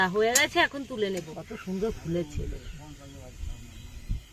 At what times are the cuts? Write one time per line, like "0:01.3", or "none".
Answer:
0:01.5